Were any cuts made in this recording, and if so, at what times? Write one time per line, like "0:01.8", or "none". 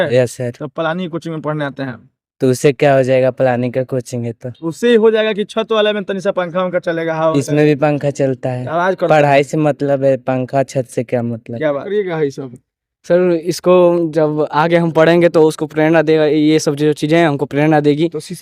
0:11.9

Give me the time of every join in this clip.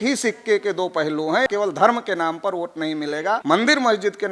0:01.5
0:03.4

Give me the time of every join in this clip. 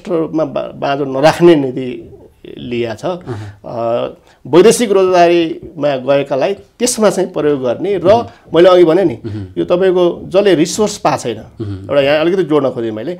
none

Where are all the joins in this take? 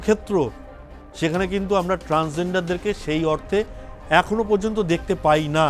none

